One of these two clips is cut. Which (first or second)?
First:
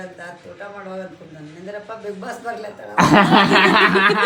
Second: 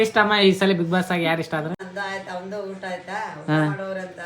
second